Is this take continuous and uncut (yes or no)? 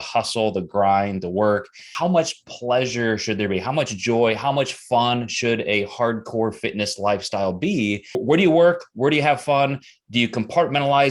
no